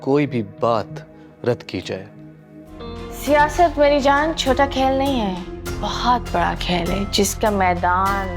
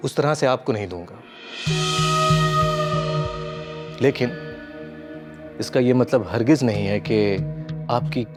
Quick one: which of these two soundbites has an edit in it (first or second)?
first